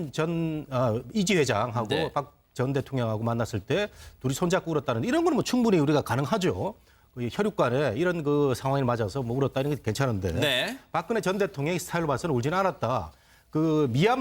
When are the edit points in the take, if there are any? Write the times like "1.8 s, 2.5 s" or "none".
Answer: none